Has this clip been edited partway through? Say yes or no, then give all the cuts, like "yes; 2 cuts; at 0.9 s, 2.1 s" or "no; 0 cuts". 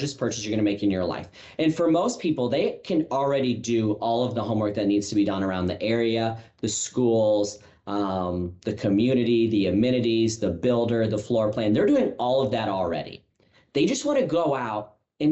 no; 0 cuts